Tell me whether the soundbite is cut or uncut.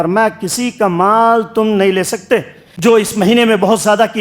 cut